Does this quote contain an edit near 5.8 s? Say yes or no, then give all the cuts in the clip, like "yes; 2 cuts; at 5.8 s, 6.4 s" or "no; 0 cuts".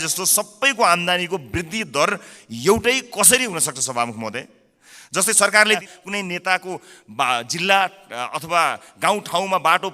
yes; 1 cut; at 5.8 s